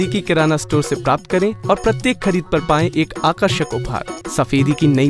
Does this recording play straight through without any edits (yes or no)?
no